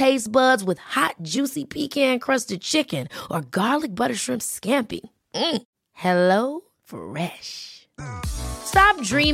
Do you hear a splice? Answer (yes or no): no